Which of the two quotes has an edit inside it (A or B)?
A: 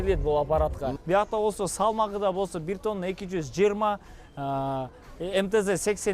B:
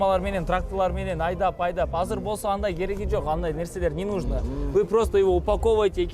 A